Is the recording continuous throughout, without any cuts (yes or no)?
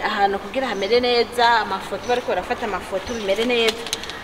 yes